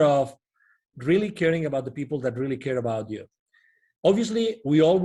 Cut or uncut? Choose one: uncut